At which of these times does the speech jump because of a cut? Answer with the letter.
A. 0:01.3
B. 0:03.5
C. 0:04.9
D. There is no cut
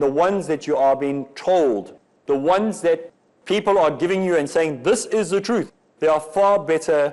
D